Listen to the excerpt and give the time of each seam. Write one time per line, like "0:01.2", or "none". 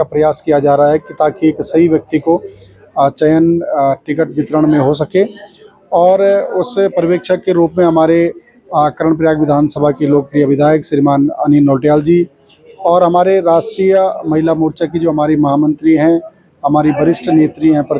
none